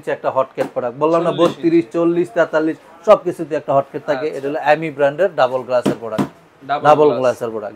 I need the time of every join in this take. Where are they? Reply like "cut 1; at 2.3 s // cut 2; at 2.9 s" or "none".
none

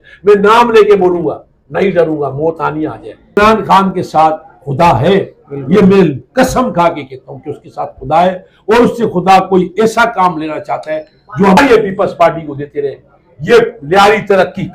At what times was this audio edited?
cut 1; at 3.4 s // cut 2; at 11.6 s

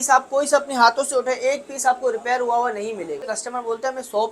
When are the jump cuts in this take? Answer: cut 1; at 3.4 s

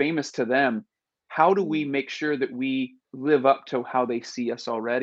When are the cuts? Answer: cut 1; at 3.0 s

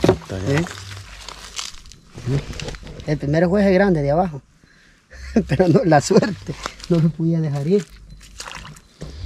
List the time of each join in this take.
none

